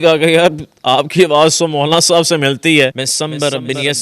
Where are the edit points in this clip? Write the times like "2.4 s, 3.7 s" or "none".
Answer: 3.0 s